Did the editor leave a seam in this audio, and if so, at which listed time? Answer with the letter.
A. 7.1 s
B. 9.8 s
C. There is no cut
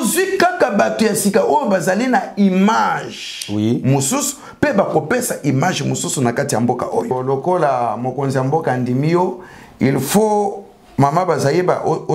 A